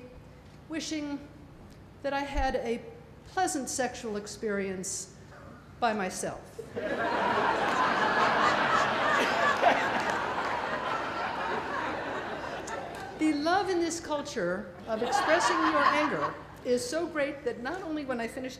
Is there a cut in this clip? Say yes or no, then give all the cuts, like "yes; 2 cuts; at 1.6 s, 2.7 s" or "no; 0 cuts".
yes; 1 cut; at 10.9 s